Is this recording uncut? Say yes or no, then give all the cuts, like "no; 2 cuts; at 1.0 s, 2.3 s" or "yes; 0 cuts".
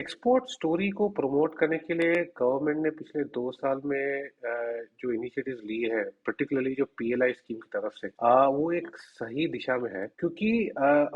no; 2 cuts; at 8.0 s, 10.1 s